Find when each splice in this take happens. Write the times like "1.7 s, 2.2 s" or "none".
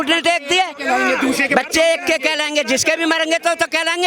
none